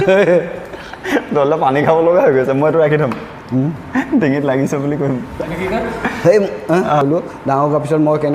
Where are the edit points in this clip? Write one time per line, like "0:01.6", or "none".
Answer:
0:07.0